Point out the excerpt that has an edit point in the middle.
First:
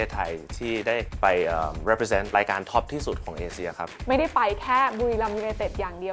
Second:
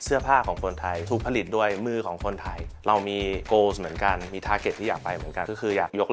first; 3 cuts; at 1.1 s, 2.3 s, 3.9 s

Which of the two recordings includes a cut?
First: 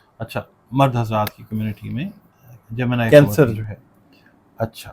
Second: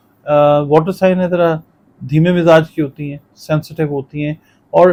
first; 1 cut; at 3.1 s

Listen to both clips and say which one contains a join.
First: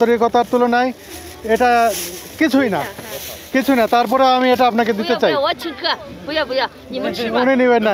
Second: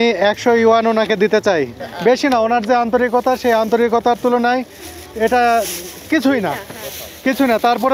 second; 1 cut; at 1.8 s

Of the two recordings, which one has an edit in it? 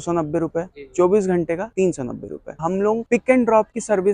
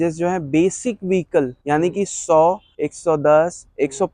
first; 1 cut; at 2.6 s

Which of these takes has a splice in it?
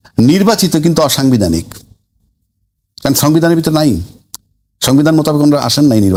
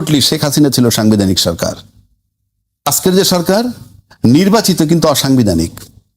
second; 1 cut; at 2.9 s

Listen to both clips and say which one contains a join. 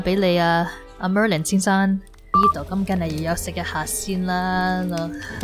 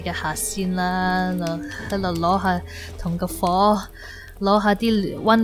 first; 1 cut; at 2.4 s

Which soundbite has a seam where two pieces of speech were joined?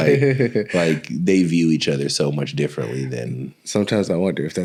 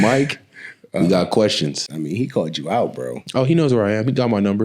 second; 1 cut; at 1.9 s

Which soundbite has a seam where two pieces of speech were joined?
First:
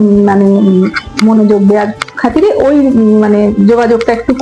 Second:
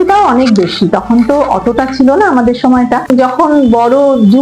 second; 1 cut; at 3.1 s

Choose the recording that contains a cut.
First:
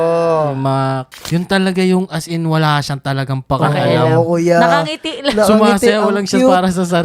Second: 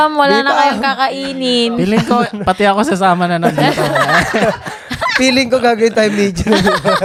first; 1 cut; at 1.1 s

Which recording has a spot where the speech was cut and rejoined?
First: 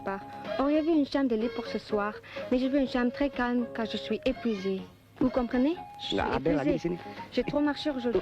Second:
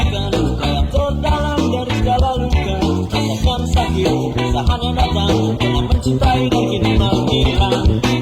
first; 1 cut; at 5.5 s

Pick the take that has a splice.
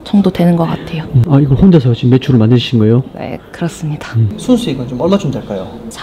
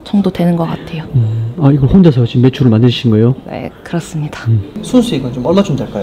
first; 2 cuts; at 1.1 s, 4.3 s

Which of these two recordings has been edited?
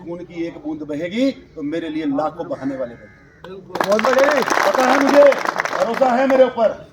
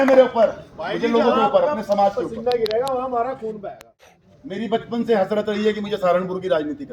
second; 1 cut; at 4.1 s

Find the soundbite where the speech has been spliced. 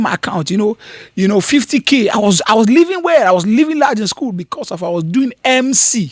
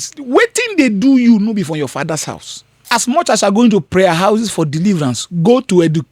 second; 1 cut; at 2.9 s

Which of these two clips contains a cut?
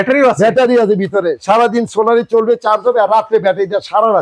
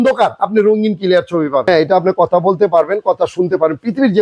second; 1 cut; at 1.7 s

